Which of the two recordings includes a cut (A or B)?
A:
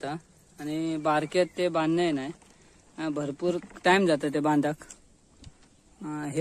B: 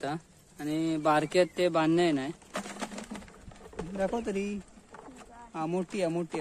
B